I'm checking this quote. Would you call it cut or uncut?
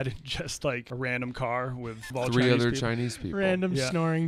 cut